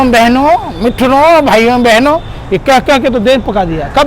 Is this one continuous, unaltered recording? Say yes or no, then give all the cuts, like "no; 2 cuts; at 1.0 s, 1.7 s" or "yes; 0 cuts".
yes; 0 cuts